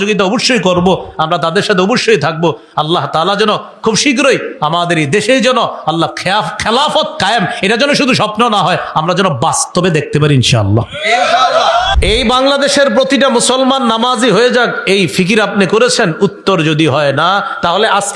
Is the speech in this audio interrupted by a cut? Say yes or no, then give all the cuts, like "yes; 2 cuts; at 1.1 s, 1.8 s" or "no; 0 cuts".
yes; 1 cut; at 11.9 s